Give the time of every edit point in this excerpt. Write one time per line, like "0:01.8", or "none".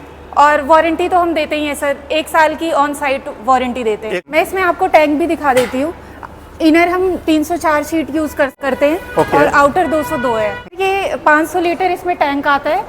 0:04.1
0:08.6
0:10.7